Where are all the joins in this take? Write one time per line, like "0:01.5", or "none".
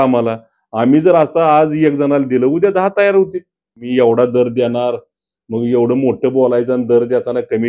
0:03.8